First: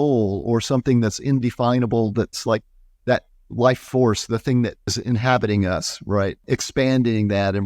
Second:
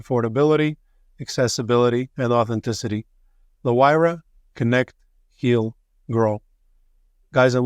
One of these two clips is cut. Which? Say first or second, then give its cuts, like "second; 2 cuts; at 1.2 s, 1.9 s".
first; 2 cuts; at 4.9 s, 6.4 s